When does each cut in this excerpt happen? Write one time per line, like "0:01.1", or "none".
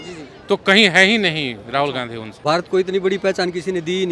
0:02.2